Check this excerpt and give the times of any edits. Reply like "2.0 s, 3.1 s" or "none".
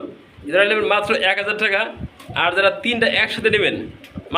none